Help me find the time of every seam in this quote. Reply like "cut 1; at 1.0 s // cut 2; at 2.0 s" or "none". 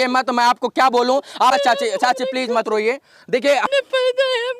cut 1; at 1.5 s // cut 2; at 3.7 s